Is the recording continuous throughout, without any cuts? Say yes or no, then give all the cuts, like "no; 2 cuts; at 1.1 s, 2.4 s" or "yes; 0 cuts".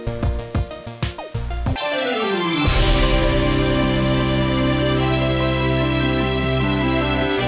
no; 1 cut; at 1.5 s